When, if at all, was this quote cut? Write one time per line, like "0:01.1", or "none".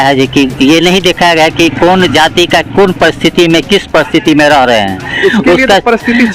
none